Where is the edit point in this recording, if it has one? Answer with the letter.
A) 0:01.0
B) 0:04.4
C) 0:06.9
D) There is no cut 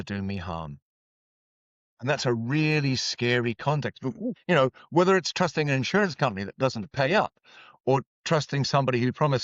B